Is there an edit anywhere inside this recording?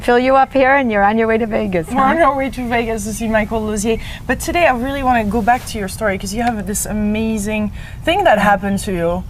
no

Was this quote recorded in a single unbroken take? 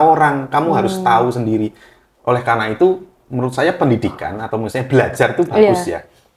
yes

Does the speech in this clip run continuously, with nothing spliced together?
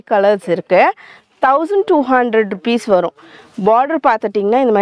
yes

